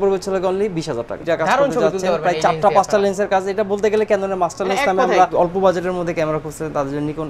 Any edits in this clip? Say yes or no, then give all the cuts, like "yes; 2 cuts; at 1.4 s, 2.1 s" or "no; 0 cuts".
yes; 2 cuts; at 1.2 s, 5.3 s